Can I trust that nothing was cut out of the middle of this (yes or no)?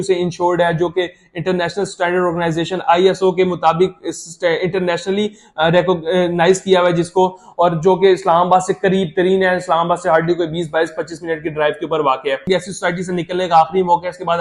no